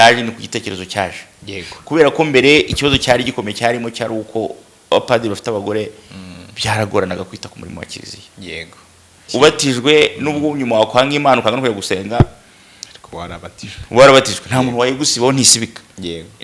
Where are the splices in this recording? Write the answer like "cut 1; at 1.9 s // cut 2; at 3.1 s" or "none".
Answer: cut 1; at 9.2 s